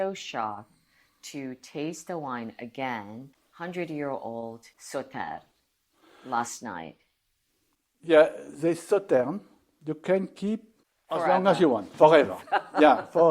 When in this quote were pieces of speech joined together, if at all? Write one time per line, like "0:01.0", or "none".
0:03.3